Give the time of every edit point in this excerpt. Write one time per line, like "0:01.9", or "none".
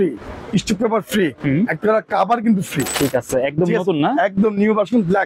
0:02.9